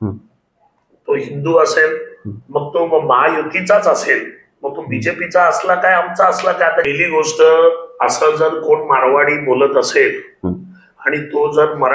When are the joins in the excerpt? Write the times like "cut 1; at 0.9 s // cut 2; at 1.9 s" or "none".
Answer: cut 1; at 6.9 s